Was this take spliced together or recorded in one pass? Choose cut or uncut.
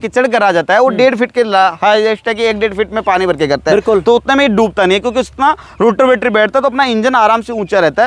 uncut